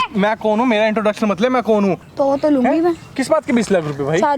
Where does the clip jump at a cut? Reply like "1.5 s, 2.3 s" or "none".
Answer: 2.0 s